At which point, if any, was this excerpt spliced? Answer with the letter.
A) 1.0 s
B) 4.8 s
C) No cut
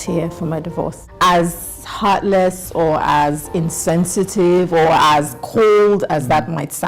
A